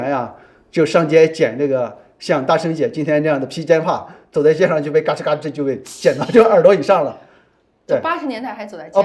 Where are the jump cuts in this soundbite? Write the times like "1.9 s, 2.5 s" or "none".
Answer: none